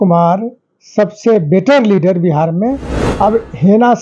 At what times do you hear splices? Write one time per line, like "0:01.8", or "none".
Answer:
0:02.9